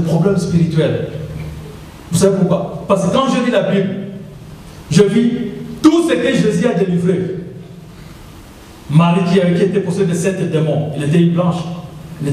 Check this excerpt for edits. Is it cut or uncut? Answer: uncut